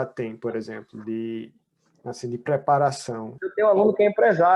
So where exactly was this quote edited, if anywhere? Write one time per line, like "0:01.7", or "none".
0:03.4